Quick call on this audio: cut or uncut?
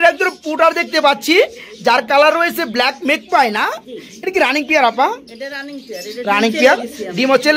uncut